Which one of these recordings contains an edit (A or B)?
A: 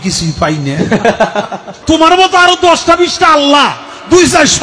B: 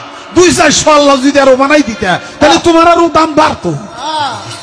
A